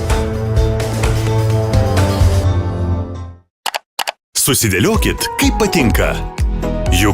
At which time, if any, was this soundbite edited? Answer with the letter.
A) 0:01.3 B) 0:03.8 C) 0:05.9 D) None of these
B